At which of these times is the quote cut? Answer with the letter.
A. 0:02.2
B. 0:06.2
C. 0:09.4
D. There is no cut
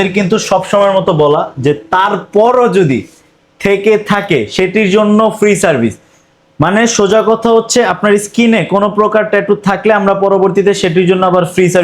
D